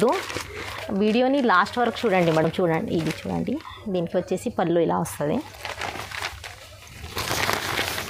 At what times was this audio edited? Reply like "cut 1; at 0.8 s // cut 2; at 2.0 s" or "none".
none